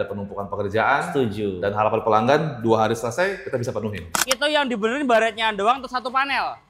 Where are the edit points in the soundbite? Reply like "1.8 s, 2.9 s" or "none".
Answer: 4.3 s